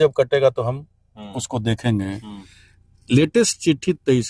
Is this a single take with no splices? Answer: yes; 0 cuts

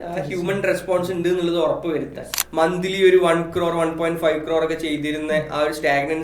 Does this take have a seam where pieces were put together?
yes; 1 cut; at 2.4 s

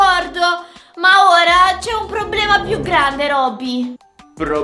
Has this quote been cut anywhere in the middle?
no; 0 cuts

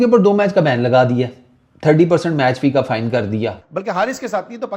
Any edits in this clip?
yes; 1 cut; at 3.7 s

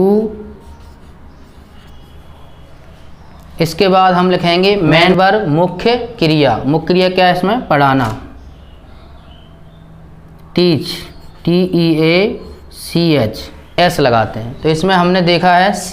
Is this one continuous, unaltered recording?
no; 2 cuts; at 5.0 s, 13.5 s

